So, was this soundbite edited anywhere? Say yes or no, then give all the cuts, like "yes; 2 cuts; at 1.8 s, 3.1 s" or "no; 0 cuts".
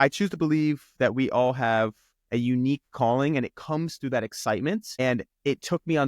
yes; 1 cut; at 4.9 s